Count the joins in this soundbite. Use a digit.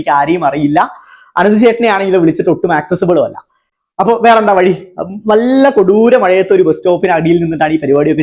0